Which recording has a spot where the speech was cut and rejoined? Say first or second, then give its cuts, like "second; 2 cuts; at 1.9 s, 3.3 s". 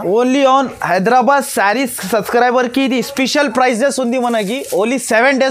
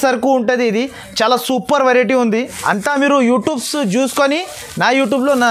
second; 1 cut; at 2.5 s